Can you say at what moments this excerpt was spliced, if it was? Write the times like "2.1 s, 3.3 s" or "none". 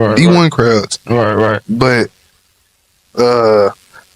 none